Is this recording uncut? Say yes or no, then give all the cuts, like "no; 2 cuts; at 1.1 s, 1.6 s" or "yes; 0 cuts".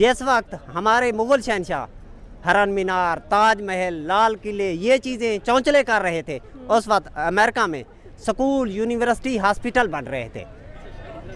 yes; 0 cuts